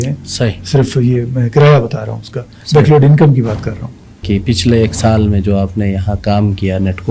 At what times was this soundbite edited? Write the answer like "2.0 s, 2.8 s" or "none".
4.2 s

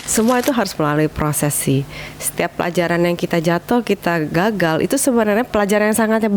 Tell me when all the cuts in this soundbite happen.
5.5 s

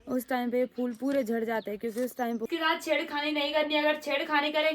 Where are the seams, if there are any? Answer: 2.4 s

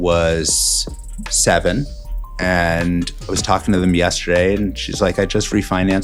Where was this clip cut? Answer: none

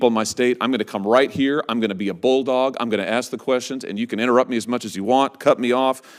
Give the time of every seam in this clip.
none

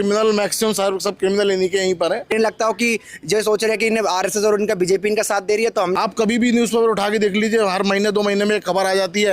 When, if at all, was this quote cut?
2.3 s, 5.9 s

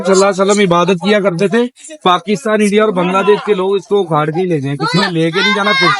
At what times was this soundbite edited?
none

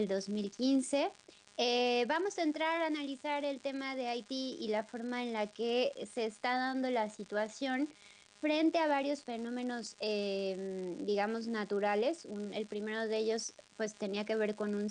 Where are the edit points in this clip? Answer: none

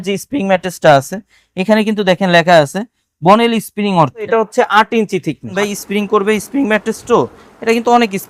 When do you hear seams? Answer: 4.3 s, 5.5 s

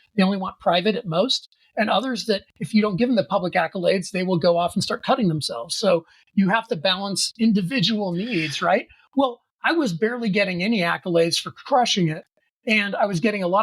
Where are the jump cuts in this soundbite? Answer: none

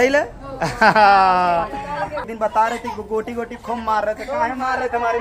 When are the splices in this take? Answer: 2.3 s

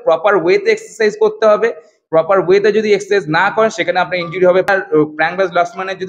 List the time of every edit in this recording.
4.7 s

